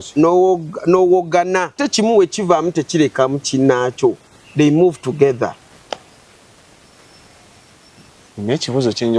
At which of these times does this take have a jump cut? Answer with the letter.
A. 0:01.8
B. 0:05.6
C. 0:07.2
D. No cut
A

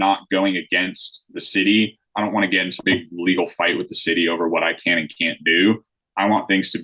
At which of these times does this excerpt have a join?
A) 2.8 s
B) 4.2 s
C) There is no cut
A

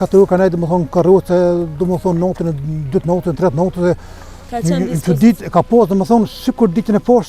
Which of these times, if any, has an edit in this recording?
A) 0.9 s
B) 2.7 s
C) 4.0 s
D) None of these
D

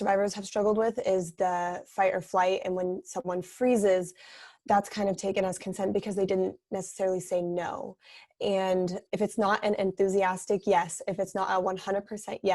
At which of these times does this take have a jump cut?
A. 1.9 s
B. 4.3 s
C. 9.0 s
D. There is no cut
C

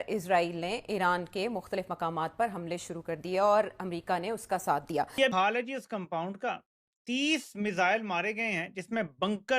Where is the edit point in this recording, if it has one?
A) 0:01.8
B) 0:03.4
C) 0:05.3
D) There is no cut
C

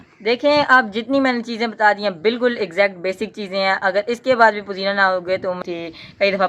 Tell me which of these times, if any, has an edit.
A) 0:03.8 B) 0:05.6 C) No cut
B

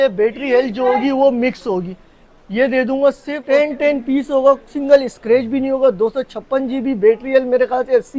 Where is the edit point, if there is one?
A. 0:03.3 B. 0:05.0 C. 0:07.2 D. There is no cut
A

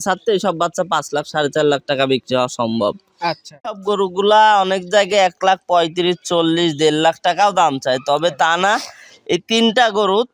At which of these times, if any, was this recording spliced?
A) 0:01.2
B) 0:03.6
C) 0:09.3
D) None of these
B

